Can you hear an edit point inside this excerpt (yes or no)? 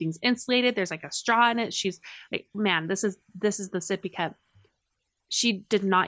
no